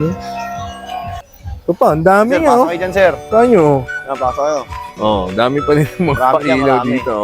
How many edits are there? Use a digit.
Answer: 1